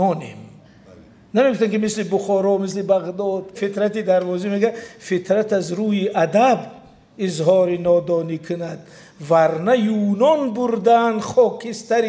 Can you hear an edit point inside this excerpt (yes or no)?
yes